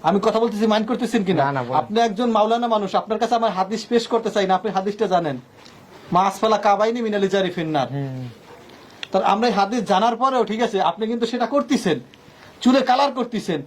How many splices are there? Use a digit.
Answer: 0